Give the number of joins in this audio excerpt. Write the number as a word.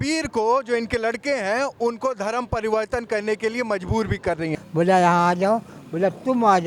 one